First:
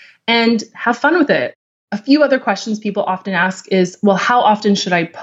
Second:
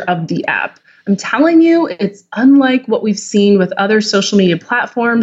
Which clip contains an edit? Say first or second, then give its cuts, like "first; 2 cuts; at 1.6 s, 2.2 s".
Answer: first; 1 cut; at 1.5 s